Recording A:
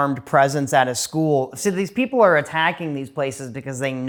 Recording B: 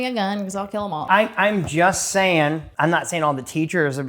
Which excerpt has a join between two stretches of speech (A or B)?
B